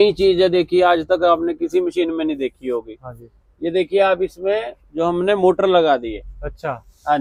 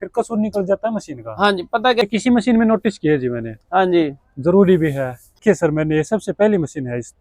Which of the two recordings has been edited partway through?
second; 2 cuts; at 2.0 s, 5.3 s

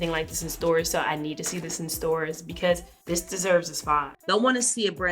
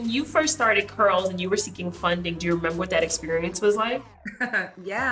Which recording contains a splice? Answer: first; 2 cuts; at 2.9 s, 4.2 s

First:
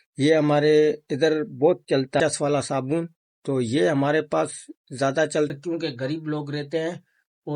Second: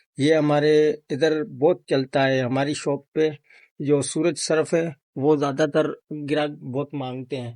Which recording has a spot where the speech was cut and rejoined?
first; 2 cuts; at 2.2 s, 5.5 s

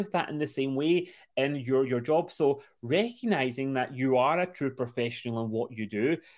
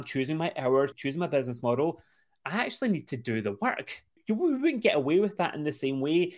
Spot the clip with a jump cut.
second; 2 cuts; at 1.0 s, 4.1 s

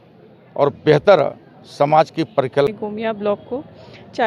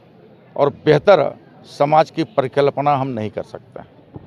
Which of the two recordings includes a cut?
first; 1 cut; at 2.7 s

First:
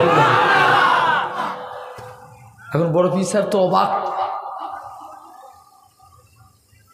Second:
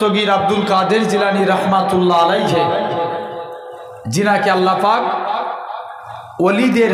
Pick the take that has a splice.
first; 1 cut; at 1.4 s

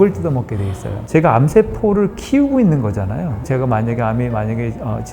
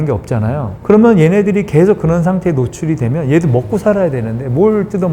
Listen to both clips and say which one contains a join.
first; 2 cuts; at 1.0 s, 3.5 s

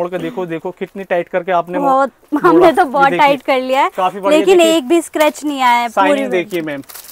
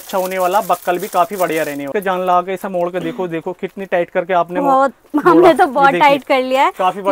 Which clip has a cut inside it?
second; 1 cut; at 1.9 s

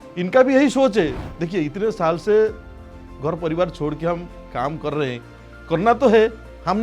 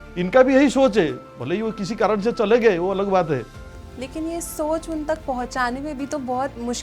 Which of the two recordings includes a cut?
first; 1 cut; at 1.3 s

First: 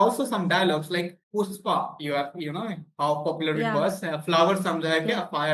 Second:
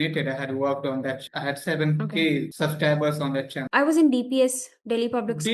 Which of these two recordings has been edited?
second; 3 cuts; at 1.2 s, 2.5 s, 3.6 s

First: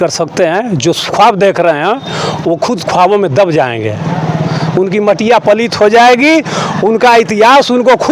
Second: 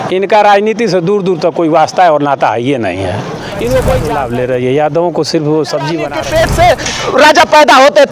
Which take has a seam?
second; 2 cuts; at 4.1 s, 6.1 s

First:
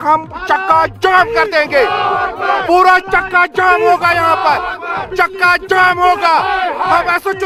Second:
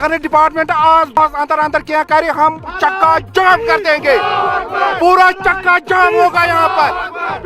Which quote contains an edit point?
second; 1 cut; at 1.2 s

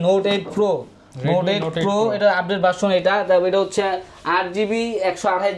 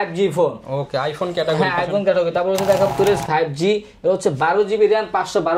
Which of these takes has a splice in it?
second; 1 cut; at 2.9 s

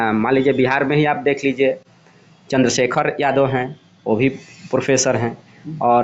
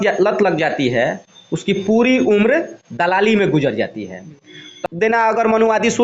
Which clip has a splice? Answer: second; 1 cut; at 4.7 s

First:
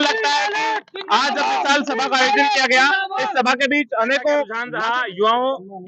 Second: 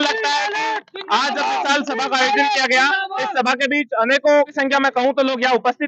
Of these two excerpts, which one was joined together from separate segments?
first; 1 cut; at 4.5 s

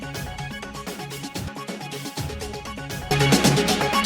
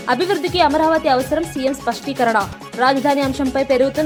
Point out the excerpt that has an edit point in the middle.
first; 1 cut; at 1.0 s

